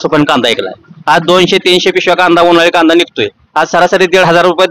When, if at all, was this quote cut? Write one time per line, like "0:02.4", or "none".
none